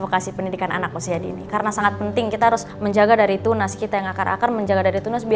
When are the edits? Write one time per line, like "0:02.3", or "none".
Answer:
none